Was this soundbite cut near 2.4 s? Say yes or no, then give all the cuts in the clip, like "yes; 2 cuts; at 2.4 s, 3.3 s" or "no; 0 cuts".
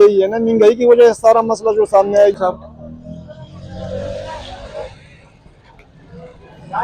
yes; 1 cut; at 2.4 s